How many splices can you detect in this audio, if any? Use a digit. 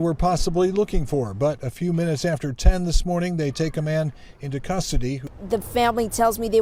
1